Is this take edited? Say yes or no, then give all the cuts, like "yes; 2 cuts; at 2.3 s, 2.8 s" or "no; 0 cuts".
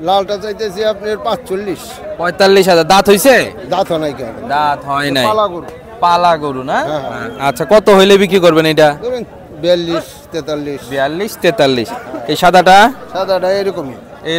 no; 0 cuts